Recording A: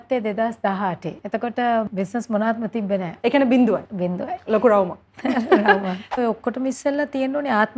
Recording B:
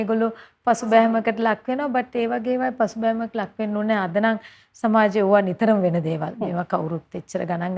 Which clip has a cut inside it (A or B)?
A